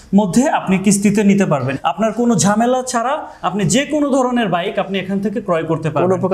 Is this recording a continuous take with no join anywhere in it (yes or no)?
no